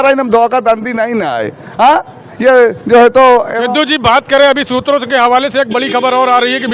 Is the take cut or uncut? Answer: uncut